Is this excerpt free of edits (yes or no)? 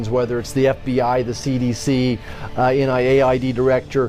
yes